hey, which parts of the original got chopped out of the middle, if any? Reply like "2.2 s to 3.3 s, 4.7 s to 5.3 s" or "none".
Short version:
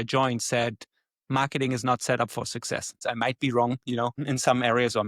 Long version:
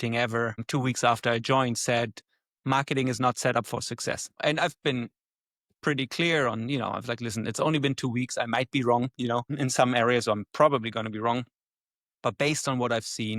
4.3 s to 8.3 s